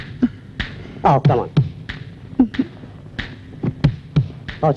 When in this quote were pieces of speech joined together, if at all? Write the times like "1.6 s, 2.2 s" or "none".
none